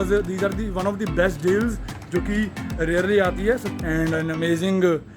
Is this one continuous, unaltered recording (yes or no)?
no